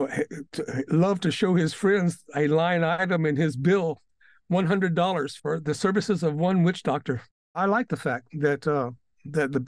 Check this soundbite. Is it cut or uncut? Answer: cut